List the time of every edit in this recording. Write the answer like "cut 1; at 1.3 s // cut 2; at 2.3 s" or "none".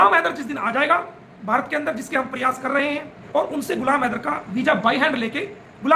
cut 1; at 3.1 s